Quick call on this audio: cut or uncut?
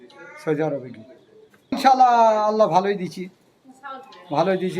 cut